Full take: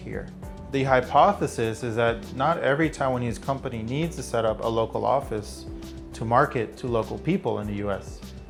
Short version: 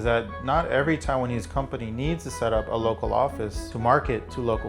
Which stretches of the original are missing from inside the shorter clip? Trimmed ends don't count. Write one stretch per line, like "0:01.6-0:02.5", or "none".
0:05.6-0:06.1